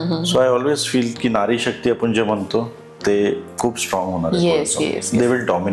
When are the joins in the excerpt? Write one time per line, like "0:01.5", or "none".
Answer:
none